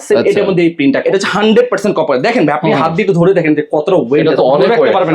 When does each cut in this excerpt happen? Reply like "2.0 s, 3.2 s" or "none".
1.0 s